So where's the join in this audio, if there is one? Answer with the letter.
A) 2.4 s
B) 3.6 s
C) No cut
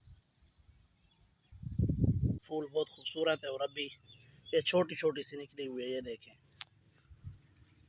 A